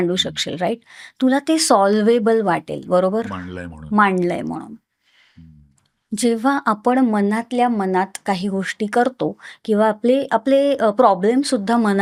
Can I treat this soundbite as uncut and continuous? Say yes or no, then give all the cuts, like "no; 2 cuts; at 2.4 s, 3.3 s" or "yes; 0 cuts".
yes; 0 cuts